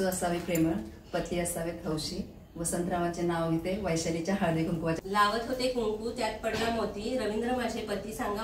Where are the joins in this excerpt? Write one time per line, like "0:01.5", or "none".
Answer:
0:04.9